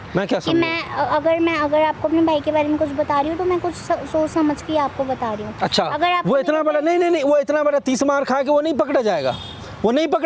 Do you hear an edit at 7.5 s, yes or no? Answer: no